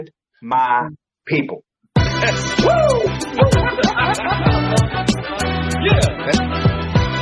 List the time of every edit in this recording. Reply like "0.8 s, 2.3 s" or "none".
4.4 s